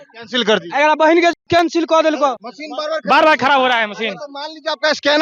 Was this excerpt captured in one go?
no; 1 cut; at 2.4 s

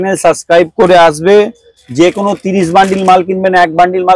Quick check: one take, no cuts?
yes; 0 cuts

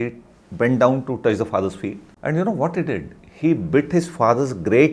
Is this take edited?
yes; 1 cut; at 2.1 s

